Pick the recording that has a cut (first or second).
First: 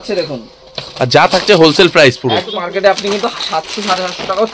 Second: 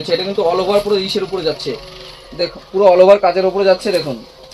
first